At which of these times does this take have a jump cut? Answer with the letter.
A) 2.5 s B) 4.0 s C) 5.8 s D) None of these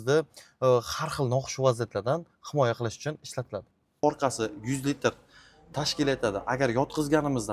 B